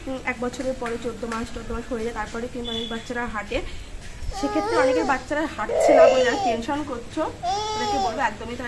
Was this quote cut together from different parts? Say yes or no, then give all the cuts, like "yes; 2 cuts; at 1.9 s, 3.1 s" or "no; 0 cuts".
no; 0 cuts